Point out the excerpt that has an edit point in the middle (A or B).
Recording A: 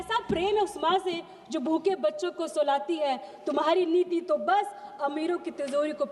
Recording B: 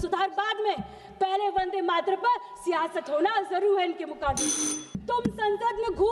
B